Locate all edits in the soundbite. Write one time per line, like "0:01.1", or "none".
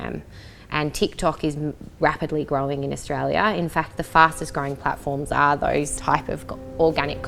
0:05.9